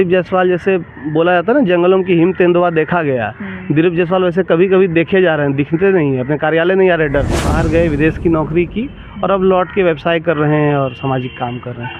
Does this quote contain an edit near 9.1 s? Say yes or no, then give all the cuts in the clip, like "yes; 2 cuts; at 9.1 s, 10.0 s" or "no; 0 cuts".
no; 1 cut; at 7.5 s